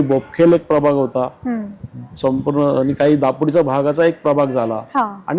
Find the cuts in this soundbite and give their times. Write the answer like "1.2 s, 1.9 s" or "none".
none